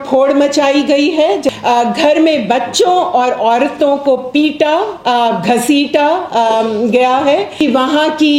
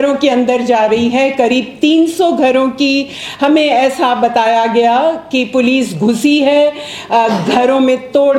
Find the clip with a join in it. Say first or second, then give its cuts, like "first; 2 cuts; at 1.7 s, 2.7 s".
first; 2 cuts; at 1.5 s, 7.5 s